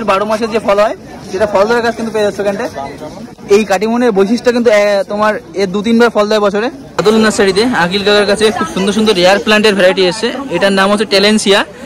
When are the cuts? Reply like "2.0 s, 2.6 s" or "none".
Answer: 7.0 s